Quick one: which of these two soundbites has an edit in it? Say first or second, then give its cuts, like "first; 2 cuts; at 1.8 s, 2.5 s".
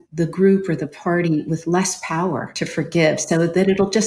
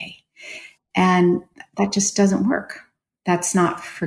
first; 1 cut; at 2.6 s